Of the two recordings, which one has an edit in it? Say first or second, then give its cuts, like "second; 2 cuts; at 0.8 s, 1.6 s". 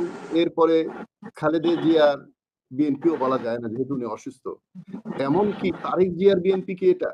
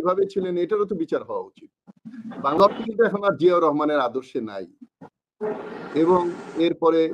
second; 1 cut; at 2.5 s